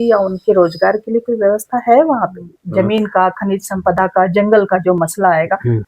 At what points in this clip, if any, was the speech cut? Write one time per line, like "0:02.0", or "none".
0:02.4